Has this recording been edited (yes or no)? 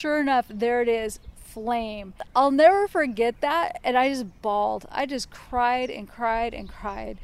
yes